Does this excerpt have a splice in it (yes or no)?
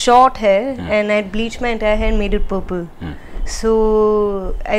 no